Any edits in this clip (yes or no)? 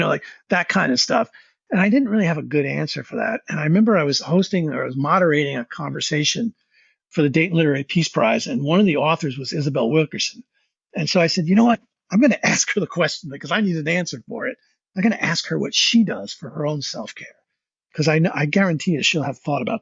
no